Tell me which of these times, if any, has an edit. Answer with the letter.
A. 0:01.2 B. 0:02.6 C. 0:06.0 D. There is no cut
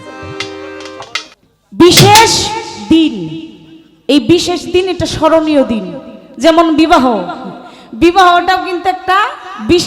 A